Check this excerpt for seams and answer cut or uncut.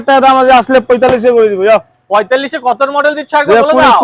uncut